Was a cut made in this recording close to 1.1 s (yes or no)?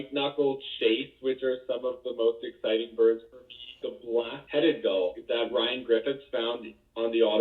no